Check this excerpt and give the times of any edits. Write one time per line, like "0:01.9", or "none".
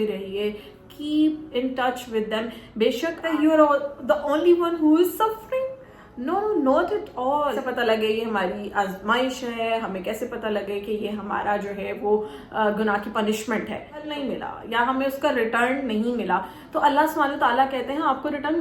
0:03.2
0:07.6
0:14.1